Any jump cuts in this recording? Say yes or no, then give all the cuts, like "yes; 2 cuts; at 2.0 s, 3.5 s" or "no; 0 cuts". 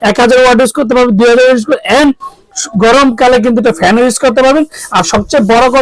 no; 0 cuts